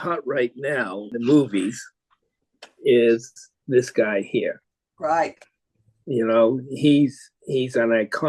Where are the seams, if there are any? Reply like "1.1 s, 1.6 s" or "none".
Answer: 1.1 s